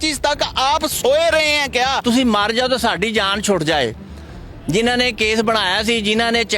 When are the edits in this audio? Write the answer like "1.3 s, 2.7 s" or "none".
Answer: 2.0 s